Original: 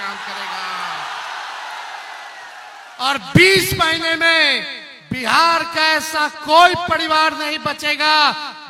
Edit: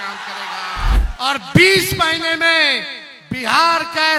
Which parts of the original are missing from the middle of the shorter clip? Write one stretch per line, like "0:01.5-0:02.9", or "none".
0:01.0-0:02.8